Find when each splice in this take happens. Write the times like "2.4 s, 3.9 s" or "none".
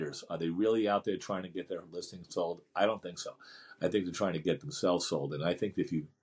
none